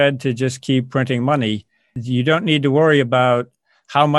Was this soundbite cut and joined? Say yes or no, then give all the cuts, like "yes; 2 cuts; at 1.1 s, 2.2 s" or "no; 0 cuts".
yes; 1 cut; at 2.0 s